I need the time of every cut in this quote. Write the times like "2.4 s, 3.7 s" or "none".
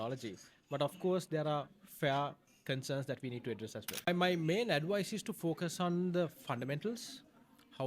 4.1 s

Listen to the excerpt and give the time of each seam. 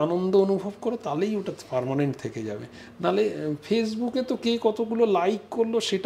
none

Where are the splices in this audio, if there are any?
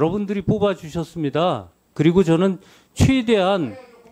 none

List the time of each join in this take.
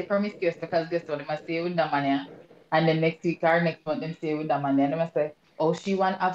none

